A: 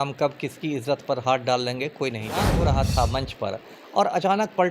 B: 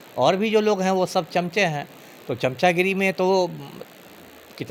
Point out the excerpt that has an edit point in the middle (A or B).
A